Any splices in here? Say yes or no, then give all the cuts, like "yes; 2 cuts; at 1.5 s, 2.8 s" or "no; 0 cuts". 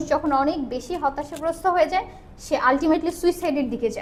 no; 0 cuts